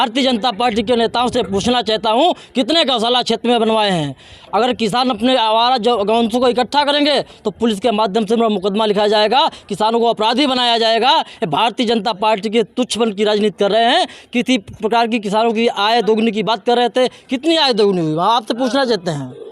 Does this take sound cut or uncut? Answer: uncut